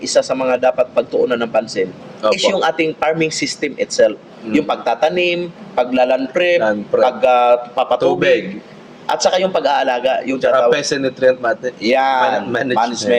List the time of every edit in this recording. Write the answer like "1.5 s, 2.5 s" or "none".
none